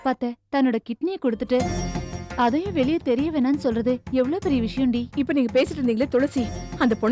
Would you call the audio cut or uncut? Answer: cut